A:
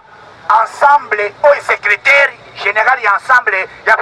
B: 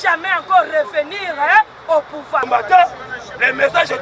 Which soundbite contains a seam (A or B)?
B